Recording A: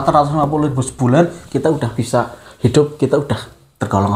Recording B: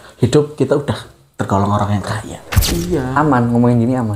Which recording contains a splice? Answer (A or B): B